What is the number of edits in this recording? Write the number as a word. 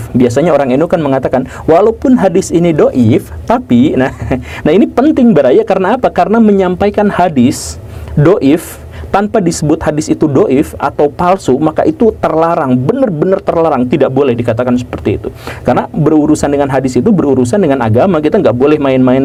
zero